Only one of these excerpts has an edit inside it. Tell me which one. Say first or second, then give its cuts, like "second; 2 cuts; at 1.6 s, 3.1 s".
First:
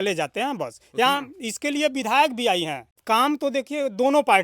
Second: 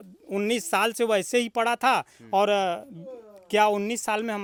first; 1 cut; at 2.9 s